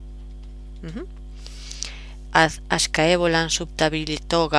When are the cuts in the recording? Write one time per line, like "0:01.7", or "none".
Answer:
none